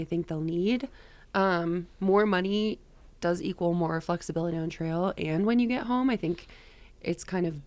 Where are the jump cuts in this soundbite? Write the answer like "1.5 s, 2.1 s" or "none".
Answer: none